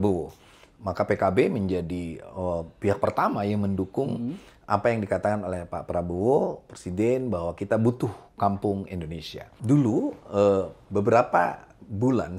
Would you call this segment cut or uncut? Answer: cut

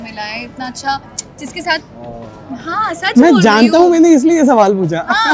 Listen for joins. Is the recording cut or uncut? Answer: uncut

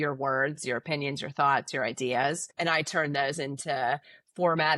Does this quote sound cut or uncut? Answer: cut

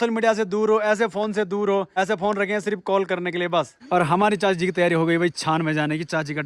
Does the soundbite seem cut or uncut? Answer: cut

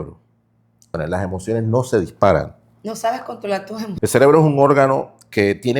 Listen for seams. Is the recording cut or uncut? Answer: cut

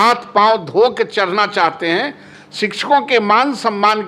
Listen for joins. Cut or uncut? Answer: cut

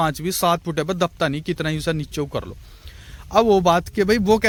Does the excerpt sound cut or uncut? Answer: uncut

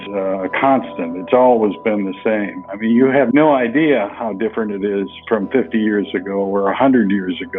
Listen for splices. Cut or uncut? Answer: uncut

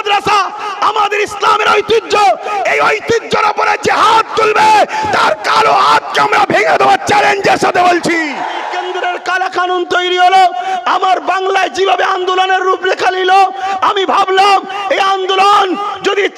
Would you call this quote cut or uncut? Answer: cut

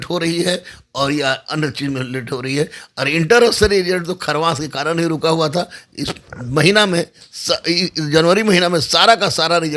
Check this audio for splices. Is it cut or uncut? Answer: uncut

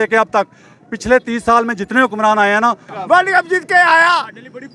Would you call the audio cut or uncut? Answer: cut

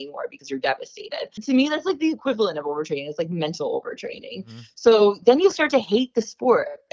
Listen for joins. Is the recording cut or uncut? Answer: cut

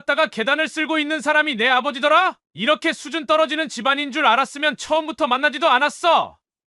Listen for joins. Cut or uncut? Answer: cut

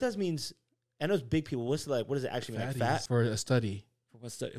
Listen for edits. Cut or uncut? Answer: cut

